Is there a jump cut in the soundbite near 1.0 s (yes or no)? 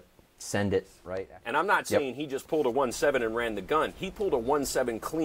yes